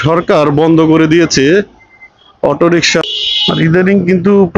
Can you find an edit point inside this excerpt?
yes; 1 cut; at 3.0 s

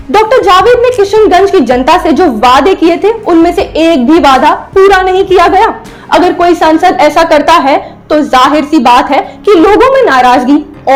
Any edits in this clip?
no; 0 cuts

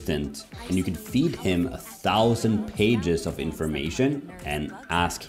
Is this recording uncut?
yes; 0 cuts

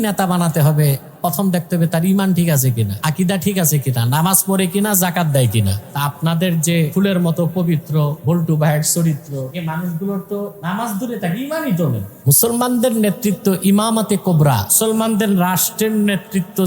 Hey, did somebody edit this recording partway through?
yes; 8 cuts; at 2.9 s, 5.8 s, 6.9 s, 8.2 s, 9.5 s, 10.6 s, 12.1 s, 14.7 s

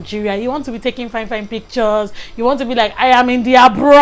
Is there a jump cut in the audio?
no; 0 cuts

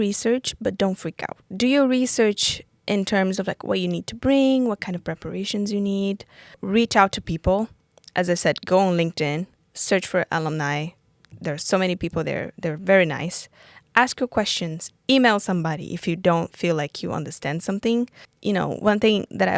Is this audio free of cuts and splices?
no; 3 cuts; at 1.5 s, 6.6 s, 18.2 s

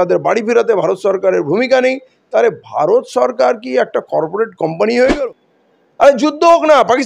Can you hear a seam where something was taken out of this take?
yes; 1 cut; at 5.2 s

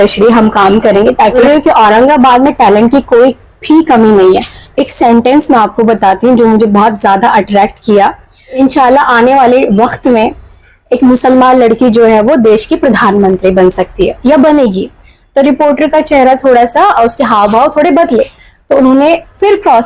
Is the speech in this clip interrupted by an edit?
yes; 3 cuts; at 1.4 s, 4.6 s, 8.6 s

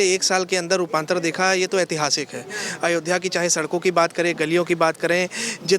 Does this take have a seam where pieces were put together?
no; 0 cuts

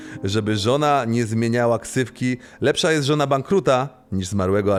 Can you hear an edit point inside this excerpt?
no; 0 cuts

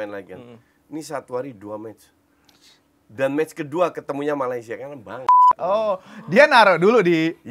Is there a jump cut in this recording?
no; 0 cuts

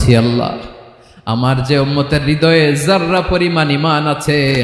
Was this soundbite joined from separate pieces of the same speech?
no; 0 cuts

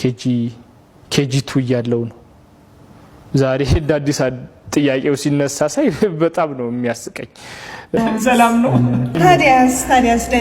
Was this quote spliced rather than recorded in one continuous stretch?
yes; 1 cut; at 8.0 s

